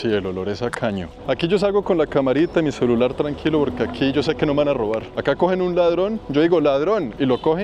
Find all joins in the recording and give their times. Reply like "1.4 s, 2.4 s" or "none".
1.1 s